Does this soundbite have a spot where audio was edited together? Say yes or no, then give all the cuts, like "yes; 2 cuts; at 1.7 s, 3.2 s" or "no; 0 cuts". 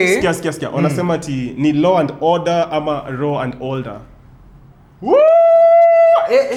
no; 0 cuts